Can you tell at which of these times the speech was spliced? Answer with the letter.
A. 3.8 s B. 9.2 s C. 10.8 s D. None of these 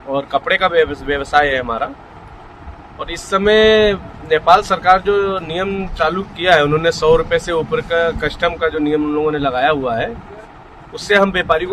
D